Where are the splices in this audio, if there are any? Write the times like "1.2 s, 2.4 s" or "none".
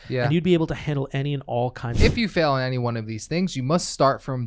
1.9 s